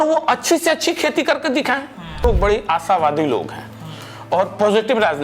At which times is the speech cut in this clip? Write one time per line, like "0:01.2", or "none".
0:02.2